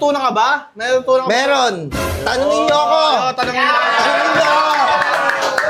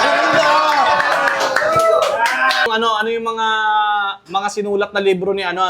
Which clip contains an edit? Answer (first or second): second